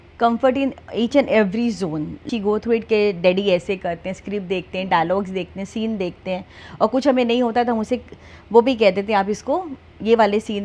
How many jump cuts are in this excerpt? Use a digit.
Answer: 1